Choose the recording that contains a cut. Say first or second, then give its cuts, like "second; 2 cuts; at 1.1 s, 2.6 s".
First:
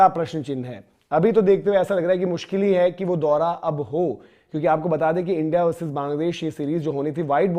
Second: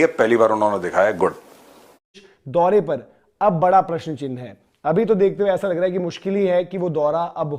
second; 1 cut; at 2.1 s